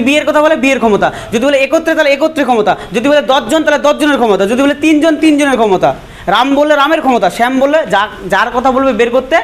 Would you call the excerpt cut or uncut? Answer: uncut